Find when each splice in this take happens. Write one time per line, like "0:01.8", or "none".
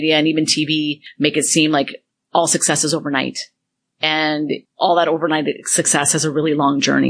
0:01.0
0:04.2